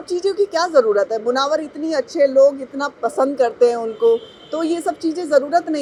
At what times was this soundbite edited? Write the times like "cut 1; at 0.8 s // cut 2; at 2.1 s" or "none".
none